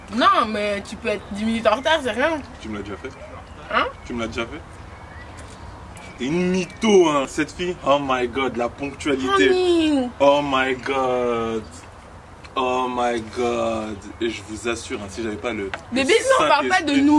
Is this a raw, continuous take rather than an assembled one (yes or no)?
yes